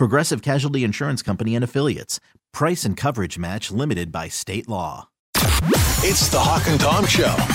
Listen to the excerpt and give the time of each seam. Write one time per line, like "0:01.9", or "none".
0:05.2